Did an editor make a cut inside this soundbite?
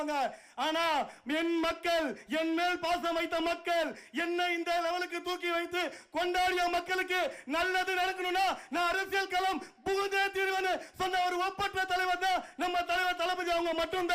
no; 0 cuts

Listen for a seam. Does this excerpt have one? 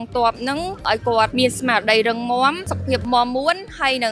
yes; 1 cut; at 2.9 s

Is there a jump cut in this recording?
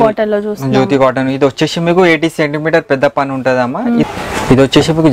yes; 1 cut; at 4.0 s

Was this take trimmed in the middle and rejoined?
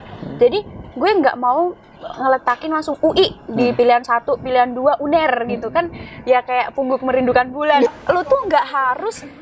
yes; 1 cut; at 7.9 s

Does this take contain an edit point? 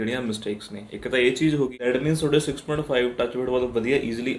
yes; 1 cut; at 1.8 s

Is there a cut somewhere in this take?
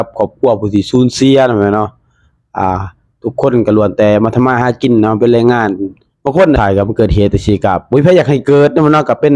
yes; 1 cut; at 6.6 s

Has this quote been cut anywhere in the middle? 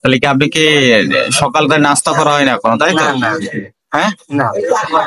no; 0 cuts

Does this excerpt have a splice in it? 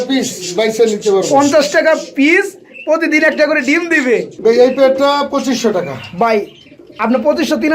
yes; 1 cut; at 4.3 s

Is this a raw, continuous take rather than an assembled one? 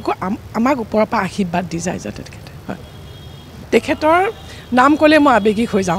no; 1 cut; at 3.5 s

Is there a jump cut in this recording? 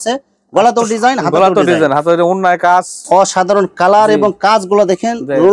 yes; 1 cut; at 3.0 s

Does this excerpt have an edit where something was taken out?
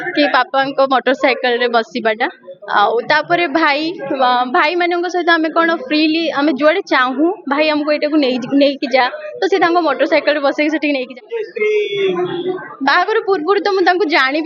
yes; 1 cut; at 11.3 s

